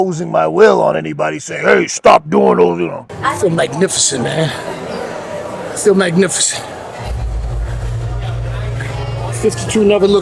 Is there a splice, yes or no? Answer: yes